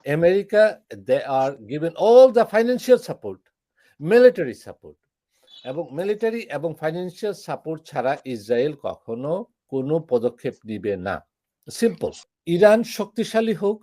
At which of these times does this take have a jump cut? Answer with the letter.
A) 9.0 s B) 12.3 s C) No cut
B